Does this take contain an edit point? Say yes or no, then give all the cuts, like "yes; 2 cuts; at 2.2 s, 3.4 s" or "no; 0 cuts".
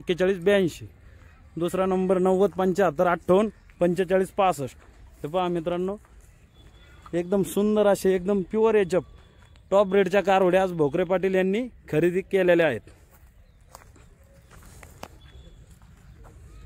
yes; 1 cut; at 14.5 s